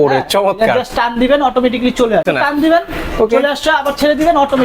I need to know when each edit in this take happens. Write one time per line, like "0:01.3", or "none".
0:02.2